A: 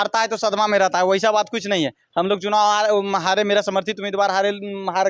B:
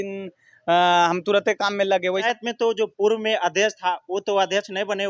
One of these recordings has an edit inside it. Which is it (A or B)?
B